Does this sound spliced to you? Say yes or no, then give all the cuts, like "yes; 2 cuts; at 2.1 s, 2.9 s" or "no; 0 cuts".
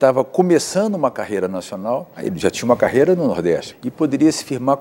yes; 2 cuts; at 2.3 s, 3.8 s